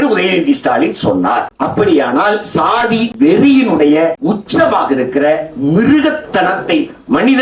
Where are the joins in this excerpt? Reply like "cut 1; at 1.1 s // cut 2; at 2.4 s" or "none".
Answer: cut 1; at 1.5 s // cut 2; at 3.1 s // cut 3; at 4.2 s